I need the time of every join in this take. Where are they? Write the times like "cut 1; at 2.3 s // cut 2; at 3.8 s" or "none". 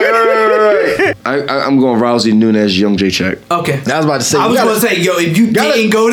cut 1; at 1.1 s

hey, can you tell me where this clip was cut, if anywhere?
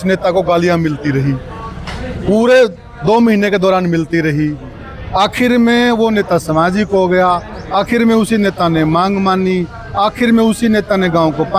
none

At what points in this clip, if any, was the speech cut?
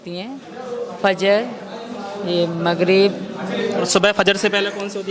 cut 1; at 3.9 s

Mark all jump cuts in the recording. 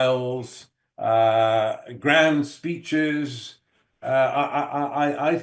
none

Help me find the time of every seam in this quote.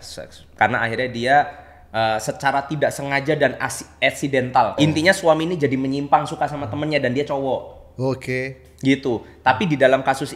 cut 1; at 4.8 s

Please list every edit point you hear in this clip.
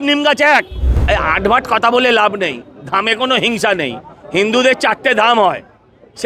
cut 1; at 1.0 s

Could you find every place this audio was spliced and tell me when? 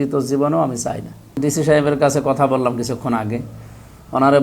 cut 1; at 1.3 s

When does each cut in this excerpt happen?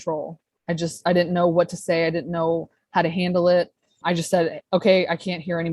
cut 1; at 4.0 s

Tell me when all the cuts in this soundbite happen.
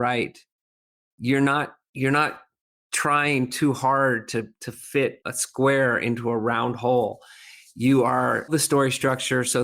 cut 1; at 8.5 s

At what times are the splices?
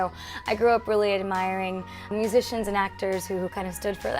cut 1; at 2.1 s

